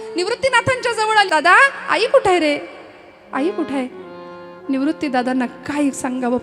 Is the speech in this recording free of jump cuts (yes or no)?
no